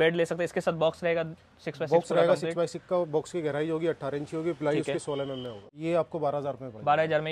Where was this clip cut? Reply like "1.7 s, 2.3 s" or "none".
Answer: 5.6 s